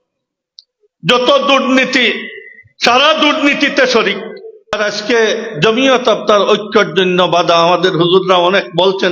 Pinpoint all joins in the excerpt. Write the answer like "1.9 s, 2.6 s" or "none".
4.8 s